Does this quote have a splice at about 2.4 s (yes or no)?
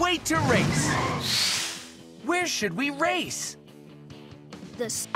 no